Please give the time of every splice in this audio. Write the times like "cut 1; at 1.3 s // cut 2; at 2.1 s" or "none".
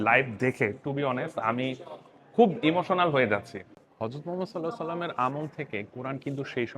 cut 1; at 3.5 s